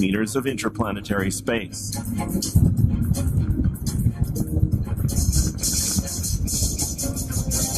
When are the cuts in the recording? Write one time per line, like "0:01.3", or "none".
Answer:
none